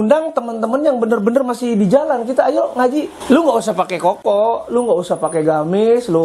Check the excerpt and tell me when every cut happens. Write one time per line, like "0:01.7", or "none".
0:03.1